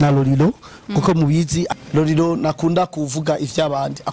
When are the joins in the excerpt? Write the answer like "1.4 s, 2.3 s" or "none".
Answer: 1.7 s